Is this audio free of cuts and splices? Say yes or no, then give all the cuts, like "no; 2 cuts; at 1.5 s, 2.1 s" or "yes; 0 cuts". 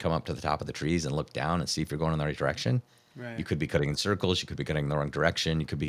yes; 0 cuts